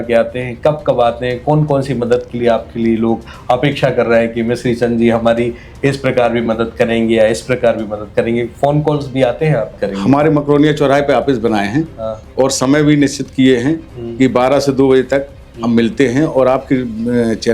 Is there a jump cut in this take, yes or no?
yes